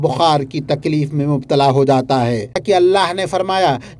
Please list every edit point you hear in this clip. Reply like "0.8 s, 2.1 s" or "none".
2.6 s